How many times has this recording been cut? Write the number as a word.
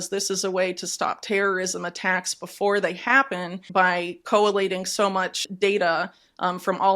two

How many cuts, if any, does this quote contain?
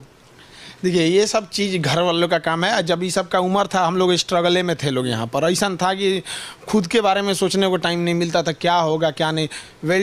zero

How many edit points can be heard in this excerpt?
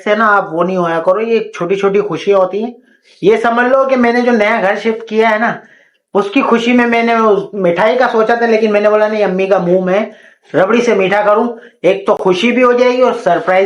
zero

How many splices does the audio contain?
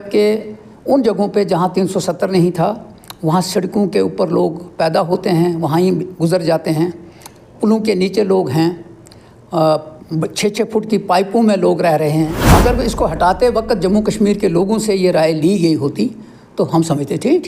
one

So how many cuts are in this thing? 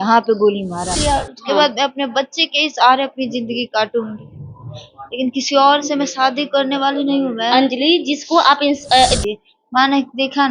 two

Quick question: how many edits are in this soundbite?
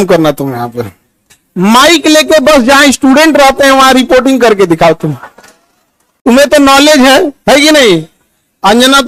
zero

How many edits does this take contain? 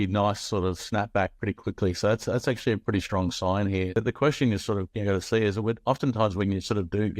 one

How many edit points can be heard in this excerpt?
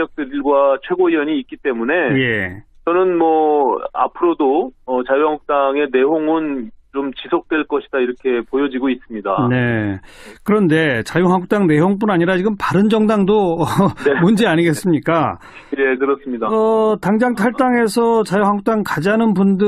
one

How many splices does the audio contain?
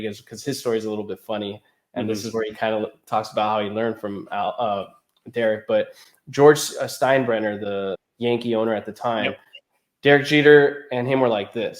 one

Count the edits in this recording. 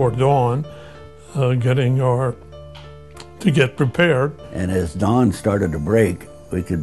one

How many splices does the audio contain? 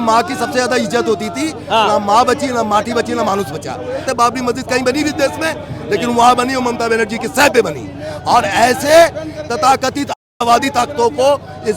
one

